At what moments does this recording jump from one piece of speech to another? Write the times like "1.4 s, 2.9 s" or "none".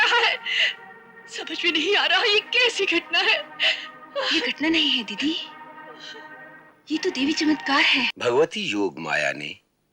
8.1 s